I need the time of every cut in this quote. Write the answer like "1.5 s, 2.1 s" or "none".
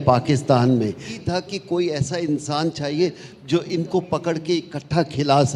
1.2 s